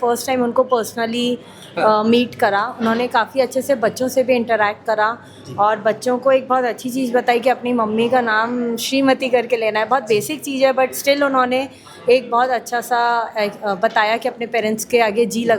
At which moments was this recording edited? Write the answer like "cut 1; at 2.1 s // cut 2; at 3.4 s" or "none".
none

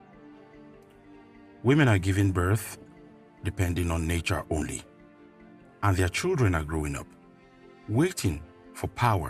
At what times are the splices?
cut 1; at 8.2 s

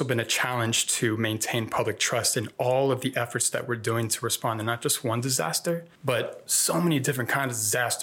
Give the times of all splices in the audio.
cut 1; at 5.9 s

